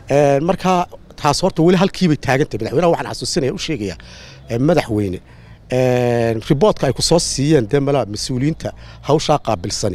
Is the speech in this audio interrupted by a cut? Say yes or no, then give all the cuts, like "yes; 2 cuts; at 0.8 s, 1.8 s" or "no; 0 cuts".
no; 0 cuts